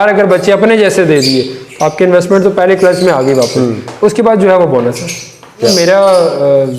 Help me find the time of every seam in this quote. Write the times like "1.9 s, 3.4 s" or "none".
5.7 s